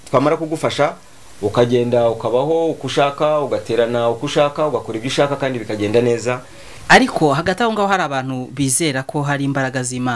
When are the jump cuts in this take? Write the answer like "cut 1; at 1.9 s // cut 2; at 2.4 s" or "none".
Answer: cut 1; at 6.7 s